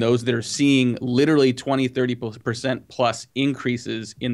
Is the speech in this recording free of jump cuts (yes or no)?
yes